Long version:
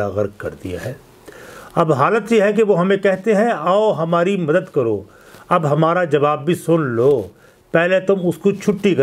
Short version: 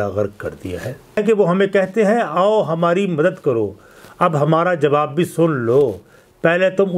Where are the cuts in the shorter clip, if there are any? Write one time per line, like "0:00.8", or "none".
0:01.2